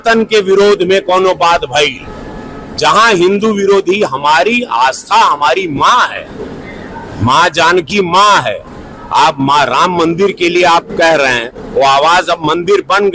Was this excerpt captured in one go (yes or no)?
yes